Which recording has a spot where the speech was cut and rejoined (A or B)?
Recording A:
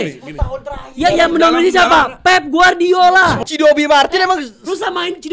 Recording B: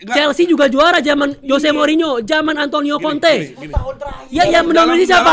A